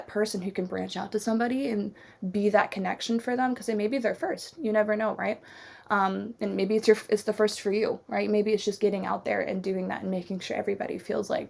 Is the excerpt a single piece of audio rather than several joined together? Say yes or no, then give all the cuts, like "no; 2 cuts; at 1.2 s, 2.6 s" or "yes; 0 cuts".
yes; 0 cuts